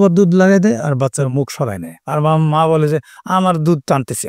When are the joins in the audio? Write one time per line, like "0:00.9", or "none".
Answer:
none